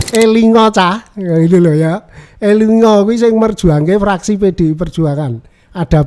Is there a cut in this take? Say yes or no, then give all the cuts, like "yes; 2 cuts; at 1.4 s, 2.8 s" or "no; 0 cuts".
no; 0 cuts